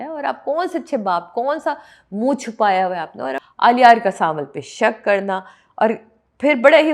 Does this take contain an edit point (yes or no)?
yes